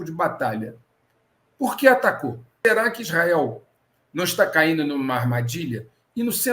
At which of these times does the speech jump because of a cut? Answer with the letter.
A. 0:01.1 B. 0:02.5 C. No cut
B